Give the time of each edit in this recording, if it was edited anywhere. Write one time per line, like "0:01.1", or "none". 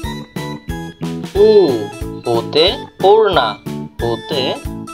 none